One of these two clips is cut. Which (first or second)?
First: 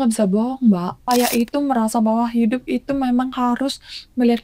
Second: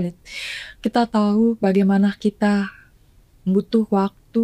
first